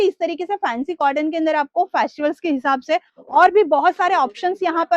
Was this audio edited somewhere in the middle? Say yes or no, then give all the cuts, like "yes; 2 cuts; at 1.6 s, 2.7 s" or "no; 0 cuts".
no; 0 cuts